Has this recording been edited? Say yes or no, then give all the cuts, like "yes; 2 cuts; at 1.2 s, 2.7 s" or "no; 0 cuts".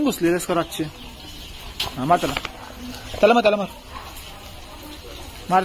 yes; 1 cut; at 1.7 s